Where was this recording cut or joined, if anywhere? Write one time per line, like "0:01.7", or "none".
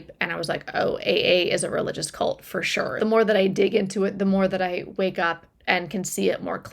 0:02.9